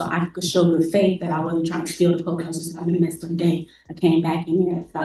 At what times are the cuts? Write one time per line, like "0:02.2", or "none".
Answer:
none

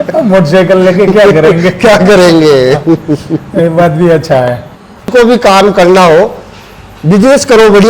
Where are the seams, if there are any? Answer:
0:05.1

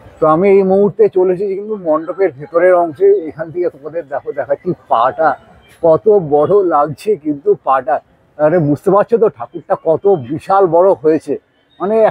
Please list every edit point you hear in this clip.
none

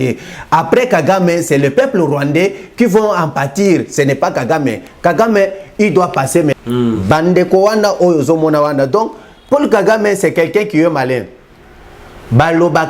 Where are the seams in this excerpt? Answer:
0:06.5

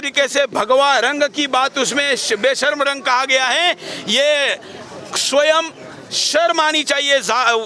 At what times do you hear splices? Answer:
none

